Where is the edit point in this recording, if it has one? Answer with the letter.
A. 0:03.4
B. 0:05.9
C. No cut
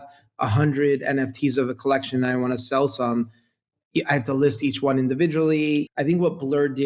B